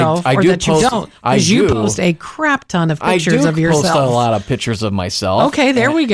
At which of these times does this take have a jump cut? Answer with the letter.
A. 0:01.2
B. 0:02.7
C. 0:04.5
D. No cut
D